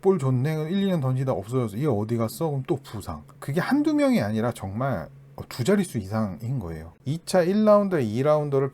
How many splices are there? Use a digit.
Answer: 1